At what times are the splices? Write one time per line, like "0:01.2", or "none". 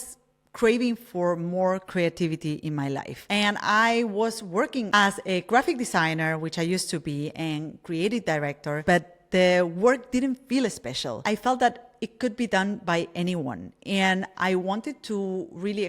0:03.1
0:08.8